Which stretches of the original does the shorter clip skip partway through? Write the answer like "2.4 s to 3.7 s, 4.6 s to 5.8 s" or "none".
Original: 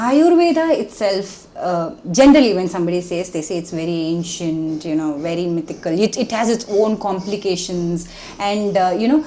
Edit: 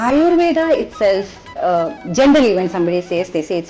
none

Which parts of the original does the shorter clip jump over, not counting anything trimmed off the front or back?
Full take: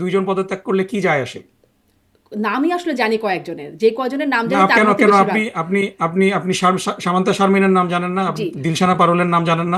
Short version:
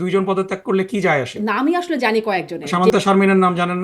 1.3 s to 2.3 s, 3.7 s to 7.1 s

